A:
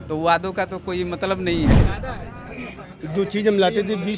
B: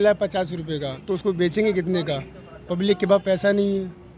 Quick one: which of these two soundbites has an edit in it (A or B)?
A